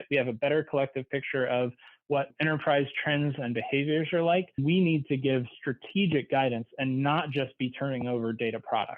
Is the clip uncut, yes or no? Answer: no